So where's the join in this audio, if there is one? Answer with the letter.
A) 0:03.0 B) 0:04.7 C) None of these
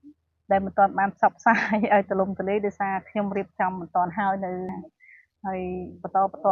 B